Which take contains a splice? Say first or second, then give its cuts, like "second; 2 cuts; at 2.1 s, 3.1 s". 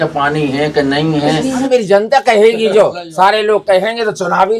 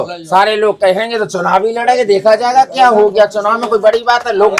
first; 1 cut; at 1.7 s